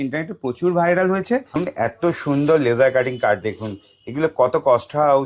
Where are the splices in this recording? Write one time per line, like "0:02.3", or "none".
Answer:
0:01.6